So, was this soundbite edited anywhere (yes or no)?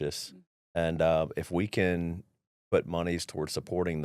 no